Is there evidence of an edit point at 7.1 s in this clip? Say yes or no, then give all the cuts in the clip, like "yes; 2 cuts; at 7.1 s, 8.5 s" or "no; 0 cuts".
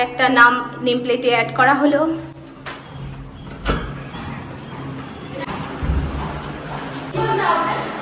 yes; 2 cuts; at 5.4 s, 7.1 s